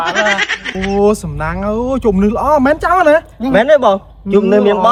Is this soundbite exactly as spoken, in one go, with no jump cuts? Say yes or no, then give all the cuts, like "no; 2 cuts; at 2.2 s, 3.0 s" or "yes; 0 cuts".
yes; 0 cuts